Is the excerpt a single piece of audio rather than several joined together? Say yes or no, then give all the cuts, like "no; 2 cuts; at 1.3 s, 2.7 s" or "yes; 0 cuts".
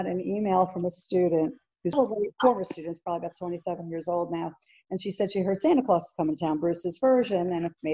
no; 1 cut; at 1.9 s